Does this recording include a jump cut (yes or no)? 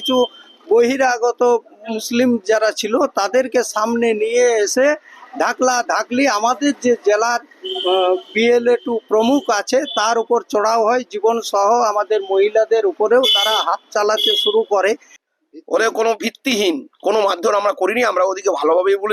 yes